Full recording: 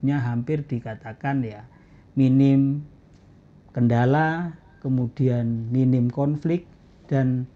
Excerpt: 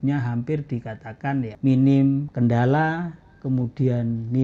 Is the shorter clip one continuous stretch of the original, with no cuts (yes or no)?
no